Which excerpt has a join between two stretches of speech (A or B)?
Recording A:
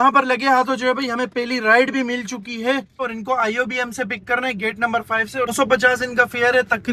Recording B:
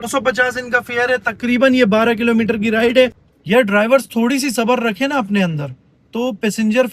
B